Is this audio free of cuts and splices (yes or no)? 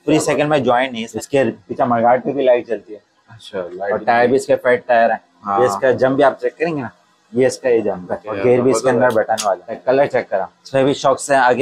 no